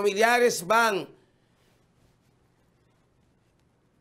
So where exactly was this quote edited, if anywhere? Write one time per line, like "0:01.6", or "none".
none